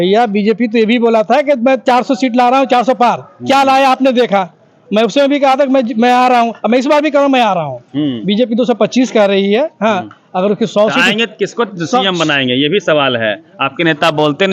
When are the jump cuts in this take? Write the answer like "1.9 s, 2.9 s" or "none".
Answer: none

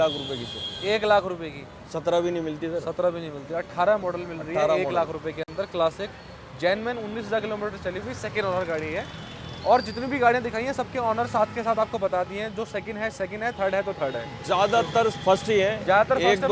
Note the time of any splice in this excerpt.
none

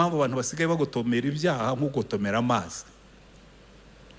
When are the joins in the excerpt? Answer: none

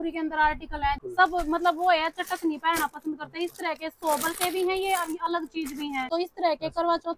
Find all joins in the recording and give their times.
1.0 s, 6.1 s

